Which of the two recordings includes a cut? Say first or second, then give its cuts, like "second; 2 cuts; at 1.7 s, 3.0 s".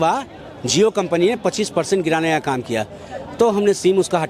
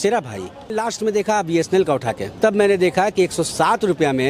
second; 2 cuts; at 0.8 s, 2.2 s